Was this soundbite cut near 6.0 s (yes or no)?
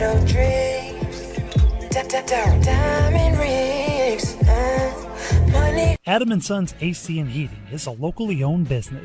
yes